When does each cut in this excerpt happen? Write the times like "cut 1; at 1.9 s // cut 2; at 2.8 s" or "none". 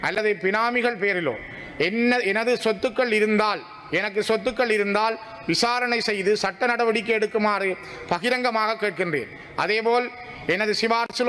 none

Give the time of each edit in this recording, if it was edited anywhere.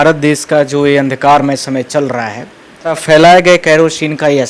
cut 1; at 3.0 s

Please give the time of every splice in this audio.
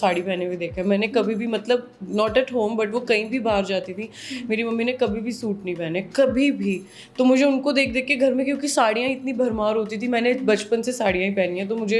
none

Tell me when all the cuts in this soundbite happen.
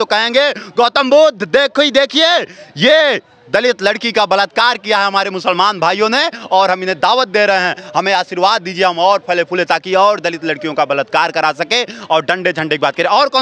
none

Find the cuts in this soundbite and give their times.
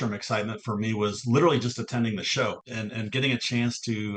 cut 1; at 2.6 s

